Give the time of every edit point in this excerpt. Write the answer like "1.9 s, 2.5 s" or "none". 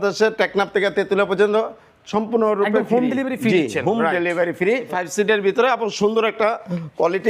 4.9 s

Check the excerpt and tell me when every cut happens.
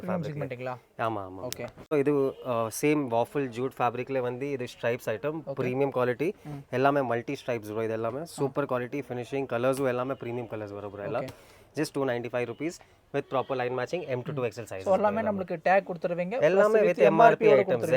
none

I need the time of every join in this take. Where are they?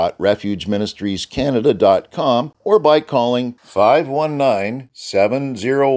2.5 s

